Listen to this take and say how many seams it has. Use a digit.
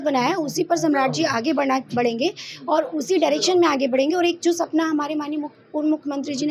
0